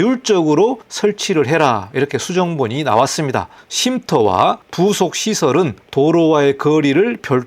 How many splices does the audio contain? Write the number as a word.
two